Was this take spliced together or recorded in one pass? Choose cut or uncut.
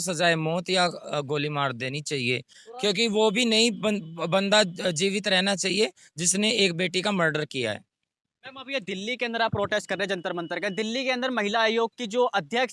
uncut